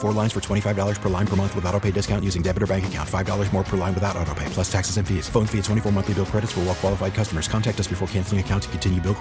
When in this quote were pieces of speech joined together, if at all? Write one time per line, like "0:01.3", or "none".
none